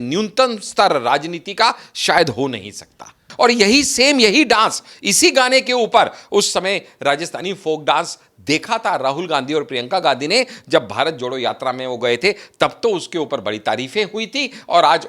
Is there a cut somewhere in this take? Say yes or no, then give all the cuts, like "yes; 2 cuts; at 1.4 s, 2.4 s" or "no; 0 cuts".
yes; 1 cut; at 3.3 s